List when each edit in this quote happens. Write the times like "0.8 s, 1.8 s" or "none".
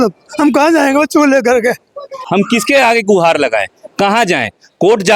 2.2 s